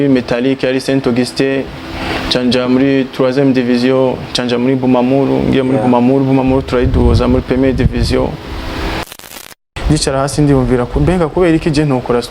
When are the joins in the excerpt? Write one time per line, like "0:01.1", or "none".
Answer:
0:09.4